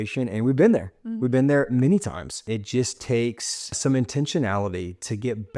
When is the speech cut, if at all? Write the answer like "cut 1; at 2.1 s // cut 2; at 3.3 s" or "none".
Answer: cut 1; at 2.4 s // cut 2; at 3.8 s